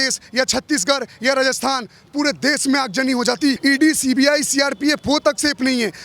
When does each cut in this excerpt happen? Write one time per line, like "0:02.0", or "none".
0:03.6